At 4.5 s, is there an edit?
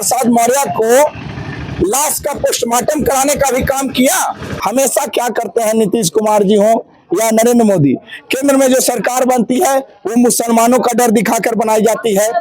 yes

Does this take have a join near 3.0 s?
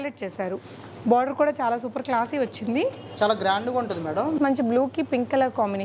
no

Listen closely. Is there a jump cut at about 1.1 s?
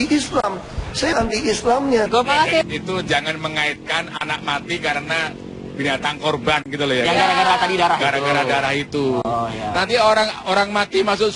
yes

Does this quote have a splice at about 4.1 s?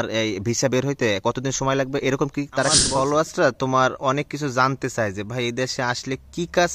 no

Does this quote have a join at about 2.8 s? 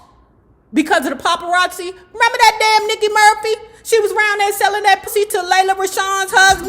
no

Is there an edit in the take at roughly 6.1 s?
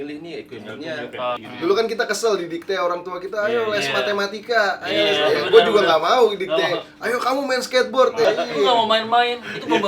no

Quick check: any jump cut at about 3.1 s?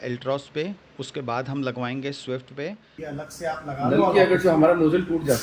yes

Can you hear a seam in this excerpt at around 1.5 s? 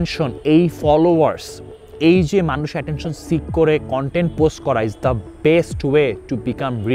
no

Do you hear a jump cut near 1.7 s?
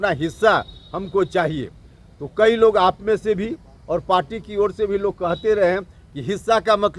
no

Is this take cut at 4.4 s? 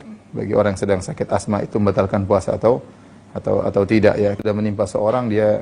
yes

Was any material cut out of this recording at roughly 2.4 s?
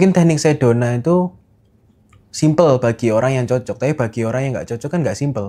no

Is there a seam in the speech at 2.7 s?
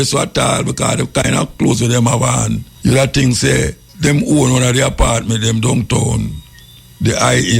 yes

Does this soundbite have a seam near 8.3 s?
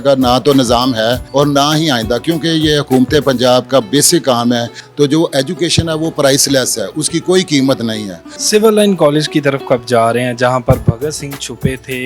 yes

